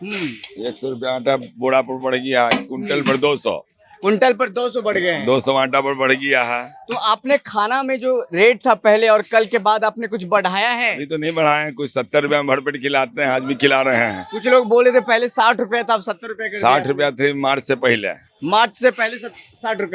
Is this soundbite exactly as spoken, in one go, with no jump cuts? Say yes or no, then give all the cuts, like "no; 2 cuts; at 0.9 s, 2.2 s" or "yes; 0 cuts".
yes; 0 cuts